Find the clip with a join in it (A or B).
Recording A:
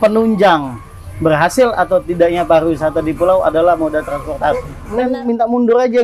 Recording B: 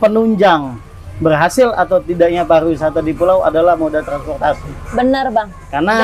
A